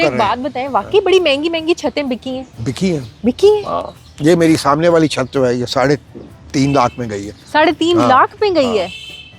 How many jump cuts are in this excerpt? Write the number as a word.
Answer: zero